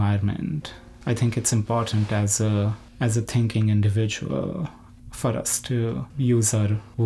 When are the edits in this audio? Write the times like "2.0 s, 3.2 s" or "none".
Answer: none